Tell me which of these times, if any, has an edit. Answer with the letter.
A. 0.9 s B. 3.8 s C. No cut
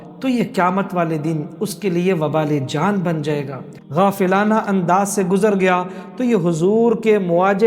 B